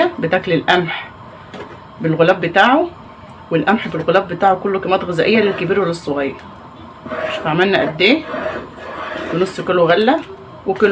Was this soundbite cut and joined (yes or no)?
yes